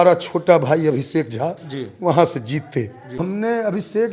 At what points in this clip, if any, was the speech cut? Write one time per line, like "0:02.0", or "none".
0:03.2